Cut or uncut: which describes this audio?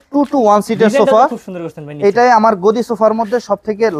uncut